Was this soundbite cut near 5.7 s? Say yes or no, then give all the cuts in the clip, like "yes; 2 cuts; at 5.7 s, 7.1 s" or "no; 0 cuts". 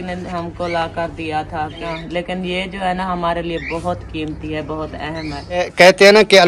yes; 2 cuts; at 2.1 s, 5.7 s